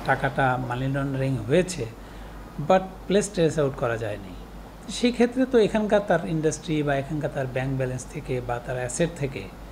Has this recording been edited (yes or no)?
no